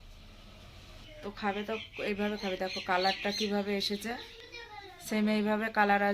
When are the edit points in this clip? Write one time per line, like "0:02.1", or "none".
0:01.0